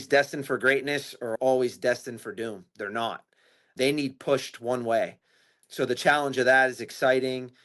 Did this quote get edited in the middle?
yes; 1 cut; at 1.3 s

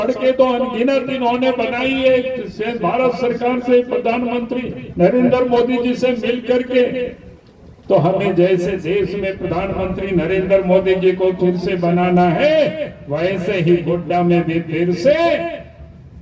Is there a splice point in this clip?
no; 0 cuts

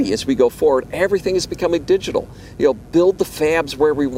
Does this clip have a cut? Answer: no; 0 cuts

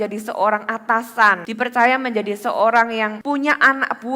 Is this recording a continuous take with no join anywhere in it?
no; 2 cuts; at 1.5 s, 3.2 s

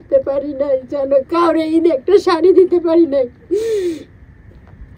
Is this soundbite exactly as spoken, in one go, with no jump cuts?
yes; 0 cuts

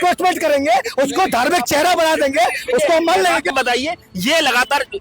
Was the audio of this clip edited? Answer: yes; 1 cut; at 3.5 s

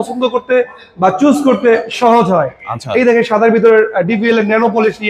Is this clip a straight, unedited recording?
yes; 0 cuts

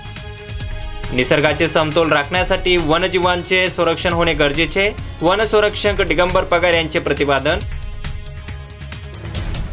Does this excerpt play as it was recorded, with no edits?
yes; 0 cuts

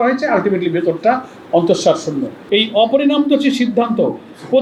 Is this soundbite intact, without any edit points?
yes; 0 cuts

